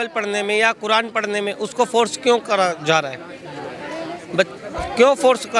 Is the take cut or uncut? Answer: uncut